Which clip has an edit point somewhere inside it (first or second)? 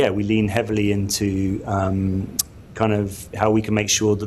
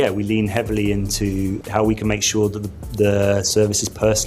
second